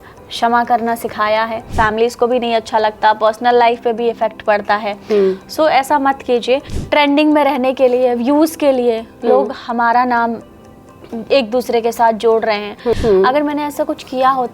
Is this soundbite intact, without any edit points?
no; 3 cuts; at 1.7 s, 6.7 s, 12.9 s

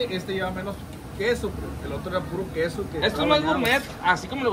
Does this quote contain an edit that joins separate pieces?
no; 0 cuts

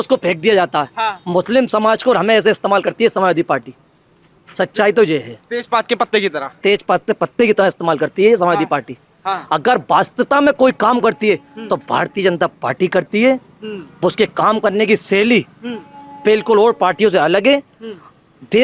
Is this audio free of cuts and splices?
yes; 0 cuts

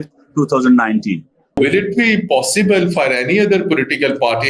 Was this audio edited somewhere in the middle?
yes; 1 cut; at 1.5 s

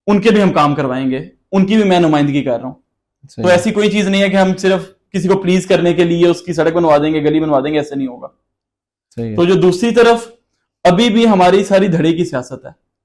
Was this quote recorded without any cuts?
yes; 0 cuts

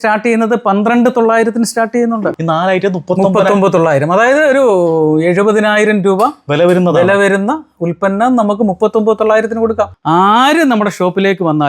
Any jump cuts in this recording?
yes; 2 cuts; at 2.2 s, 10.0 s

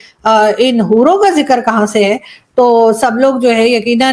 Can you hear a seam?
no; 0 cuts

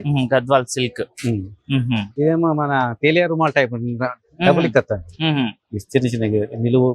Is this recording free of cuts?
no; 1 cut; at 2.1 s

